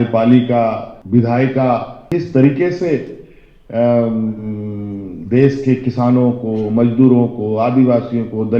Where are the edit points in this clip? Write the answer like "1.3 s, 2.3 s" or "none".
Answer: 0.9 s, 2.0 s